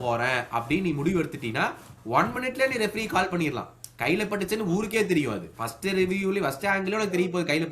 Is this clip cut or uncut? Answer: uncut